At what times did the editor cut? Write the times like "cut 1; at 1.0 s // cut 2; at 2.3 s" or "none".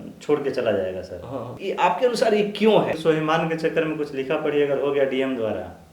cut 1; at 1.6 s // cut 2; at 3.0 s